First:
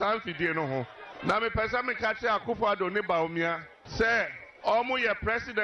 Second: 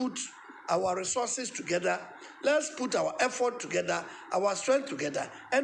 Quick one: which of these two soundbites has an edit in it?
first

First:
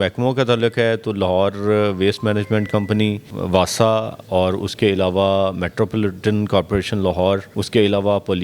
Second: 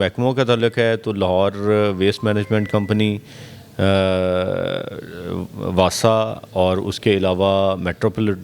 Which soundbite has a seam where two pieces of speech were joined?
first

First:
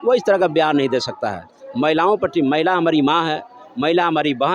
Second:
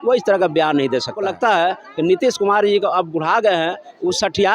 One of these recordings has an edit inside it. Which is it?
second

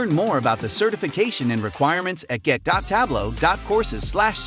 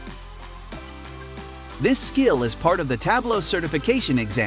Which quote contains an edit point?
second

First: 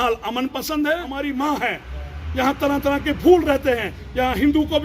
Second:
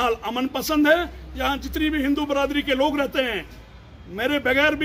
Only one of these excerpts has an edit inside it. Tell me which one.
first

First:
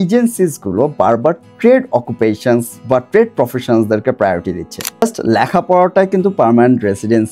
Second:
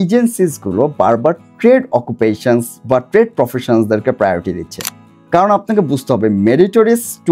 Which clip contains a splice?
first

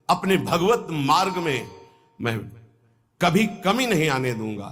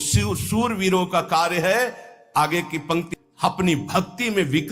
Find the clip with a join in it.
second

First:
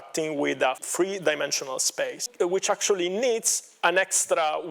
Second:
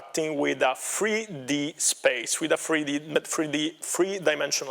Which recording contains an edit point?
first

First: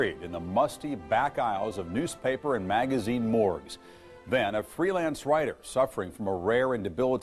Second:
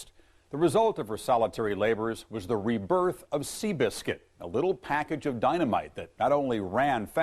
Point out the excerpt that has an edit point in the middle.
second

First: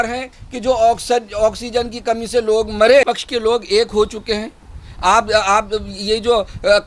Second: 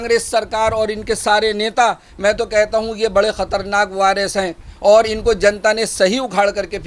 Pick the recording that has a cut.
first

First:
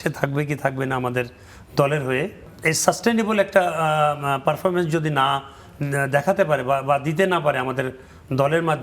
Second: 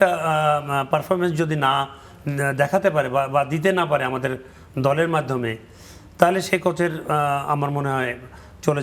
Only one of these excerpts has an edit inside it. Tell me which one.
first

